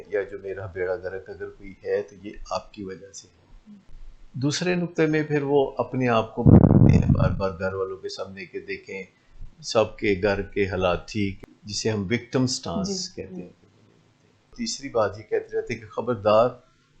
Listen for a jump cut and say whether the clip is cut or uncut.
cut